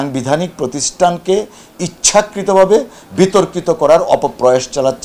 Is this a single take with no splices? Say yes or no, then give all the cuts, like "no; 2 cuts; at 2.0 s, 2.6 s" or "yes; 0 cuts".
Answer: yes; 0 cuts